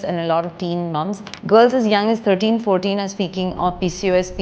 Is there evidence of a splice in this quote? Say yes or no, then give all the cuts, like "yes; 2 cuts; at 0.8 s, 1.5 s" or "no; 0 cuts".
yes; 1 cut; at 1.3 s